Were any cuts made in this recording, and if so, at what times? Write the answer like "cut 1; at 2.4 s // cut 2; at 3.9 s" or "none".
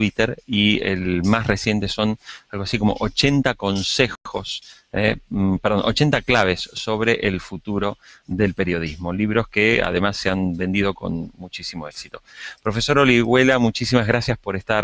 cut 1; at 13.2 s